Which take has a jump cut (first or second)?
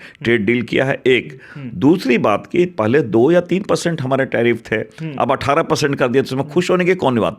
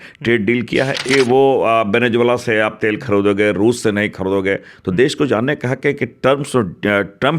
second